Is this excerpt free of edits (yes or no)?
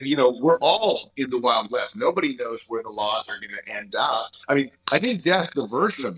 no